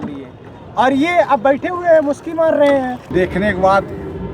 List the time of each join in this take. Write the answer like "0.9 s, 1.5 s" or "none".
3.0 s

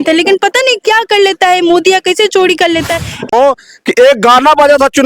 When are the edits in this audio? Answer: 3.3 s

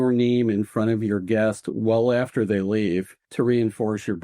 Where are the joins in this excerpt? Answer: 3.2 s

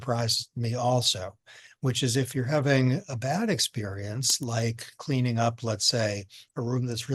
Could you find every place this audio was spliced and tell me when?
none

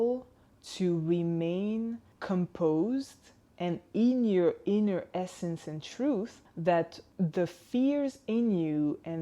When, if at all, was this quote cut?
2.1 s, 6.4 s, 7.0 s

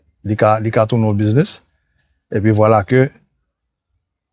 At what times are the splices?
none

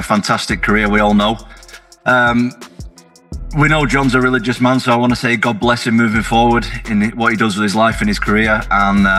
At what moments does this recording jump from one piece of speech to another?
none

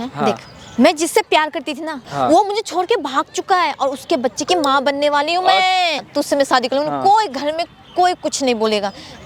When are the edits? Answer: 2.0 s, 6.0 s

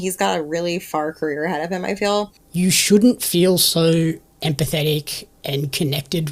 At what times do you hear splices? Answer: 2.3 s

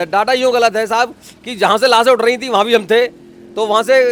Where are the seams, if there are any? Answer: none

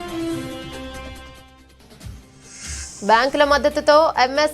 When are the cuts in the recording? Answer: 2.6 s

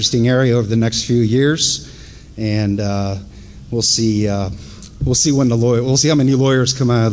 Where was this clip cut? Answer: 3.2 s

